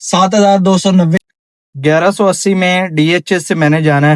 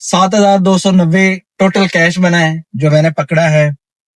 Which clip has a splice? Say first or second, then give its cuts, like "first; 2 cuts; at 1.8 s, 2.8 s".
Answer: first; 1 cut; at 1.2 s